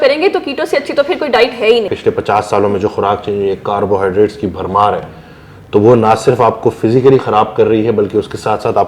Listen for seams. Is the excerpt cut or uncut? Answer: cut